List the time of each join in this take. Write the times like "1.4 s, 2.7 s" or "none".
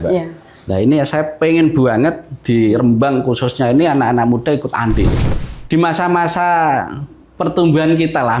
5.2 s